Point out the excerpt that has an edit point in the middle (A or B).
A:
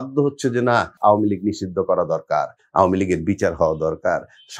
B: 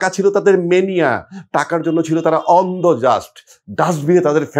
A